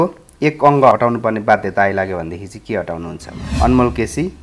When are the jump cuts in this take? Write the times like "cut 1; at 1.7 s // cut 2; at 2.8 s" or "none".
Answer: cut 1; at 3.4 s